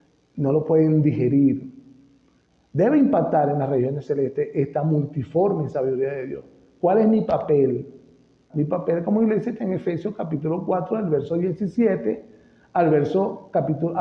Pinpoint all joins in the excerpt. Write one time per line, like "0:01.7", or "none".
0:08.4